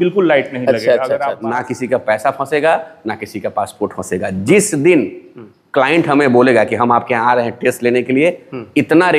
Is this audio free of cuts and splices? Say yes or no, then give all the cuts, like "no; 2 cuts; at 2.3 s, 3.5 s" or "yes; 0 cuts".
no; 1 cut; at 1.5 s